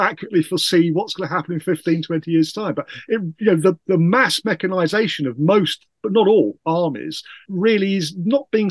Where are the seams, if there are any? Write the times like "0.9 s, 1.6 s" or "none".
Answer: 7.5 s